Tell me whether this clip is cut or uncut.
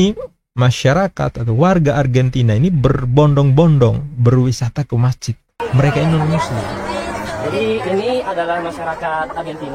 cut